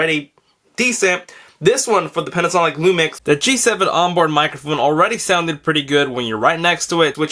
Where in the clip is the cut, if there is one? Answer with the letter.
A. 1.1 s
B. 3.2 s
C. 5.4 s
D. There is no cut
D